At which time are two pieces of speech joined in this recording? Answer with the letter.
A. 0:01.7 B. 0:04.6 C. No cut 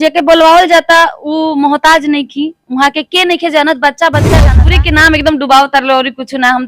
B